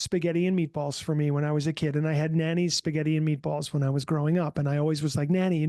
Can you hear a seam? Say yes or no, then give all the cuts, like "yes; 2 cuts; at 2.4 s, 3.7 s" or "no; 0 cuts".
no; 0 cuts